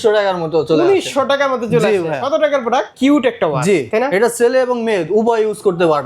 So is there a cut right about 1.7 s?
no; 1 cut; at 2.9 s

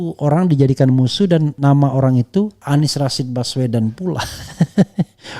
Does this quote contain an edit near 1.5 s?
yes; 2 cuts; at 1.5 s, 2.6 s

